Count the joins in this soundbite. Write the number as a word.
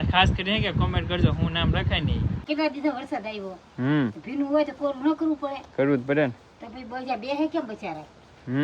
one